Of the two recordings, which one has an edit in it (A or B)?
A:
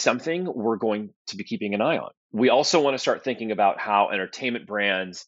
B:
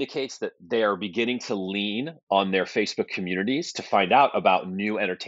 A